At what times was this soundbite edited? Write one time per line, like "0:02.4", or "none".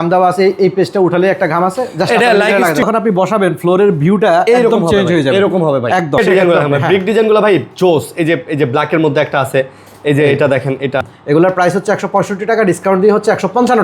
0:02.8
0:06.2
0:11.1